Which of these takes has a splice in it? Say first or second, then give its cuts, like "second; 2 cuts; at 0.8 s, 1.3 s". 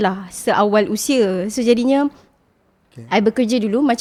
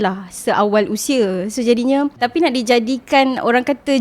second; 1 cut; at 2.1 s